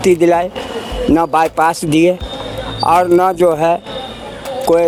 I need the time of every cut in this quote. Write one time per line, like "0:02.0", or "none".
none